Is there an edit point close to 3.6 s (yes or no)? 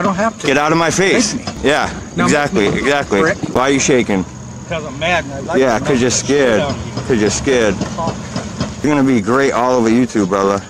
yes